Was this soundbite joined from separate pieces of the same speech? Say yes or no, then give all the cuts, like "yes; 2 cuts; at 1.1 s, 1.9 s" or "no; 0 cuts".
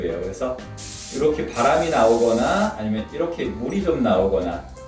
no; 0 cuts